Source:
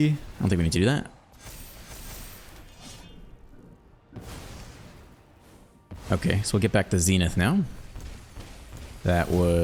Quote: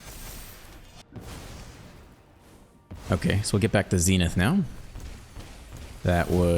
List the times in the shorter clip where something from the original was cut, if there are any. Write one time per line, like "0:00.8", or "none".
0:01.0